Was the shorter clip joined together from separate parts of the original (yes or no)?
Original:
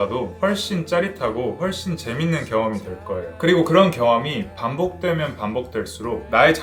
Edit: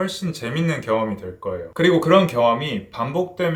no